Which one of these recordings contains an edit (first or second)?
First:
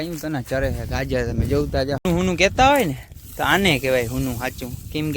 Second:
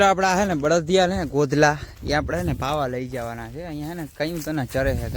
first